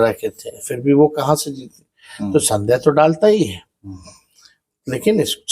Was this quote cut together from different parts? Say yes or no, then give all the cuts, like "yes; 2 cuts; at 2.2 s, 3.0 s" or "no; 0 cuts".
no; 0 cuts